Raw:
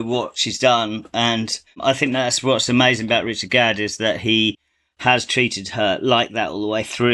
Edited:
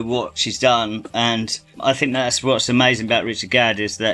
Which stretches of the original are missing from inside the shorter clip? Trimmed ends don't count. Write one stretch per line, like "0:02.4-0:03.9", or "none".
none